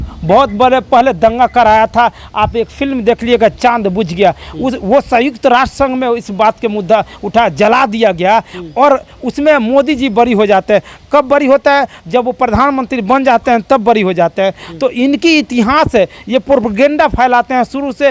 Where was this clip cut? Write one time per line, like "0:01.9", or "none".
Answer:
none